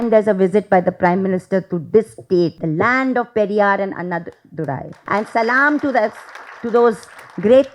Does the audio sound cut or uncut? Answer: cut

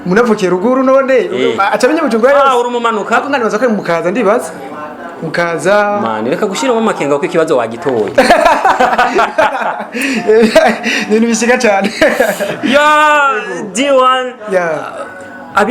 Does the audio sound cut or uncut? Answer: uncut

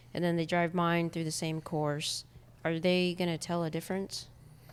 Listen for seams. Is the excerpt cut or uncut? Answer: uncut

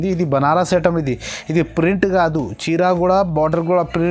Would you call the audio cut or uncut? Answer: uncut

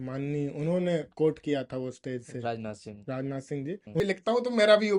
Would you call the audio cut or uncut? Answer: cut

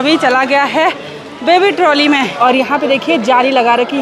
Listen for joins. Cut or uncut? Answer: cut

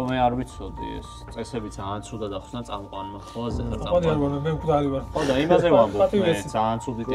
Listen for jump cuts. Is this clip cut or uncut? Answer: uncut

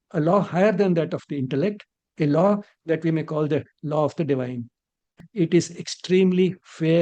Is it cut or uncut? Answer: cut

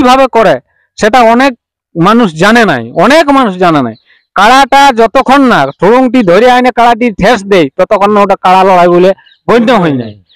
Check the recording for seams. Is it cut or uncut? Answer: uncut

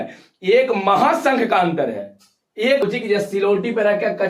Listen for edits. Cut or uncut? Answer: cut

